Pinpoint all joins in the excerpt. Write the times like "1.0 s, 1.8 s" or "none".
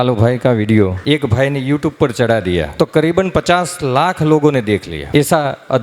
1.0 s, 2.7 s, 4.9 s